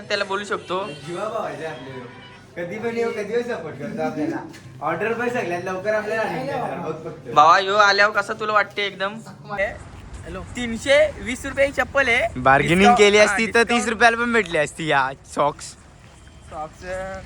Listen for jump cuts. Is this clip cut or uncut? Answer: cut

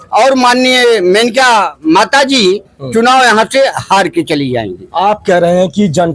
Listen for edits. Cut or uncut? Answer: uncut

